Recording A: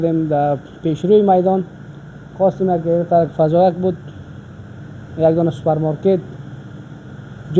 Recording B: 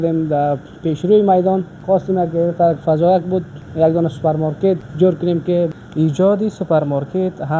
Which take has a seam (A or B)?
B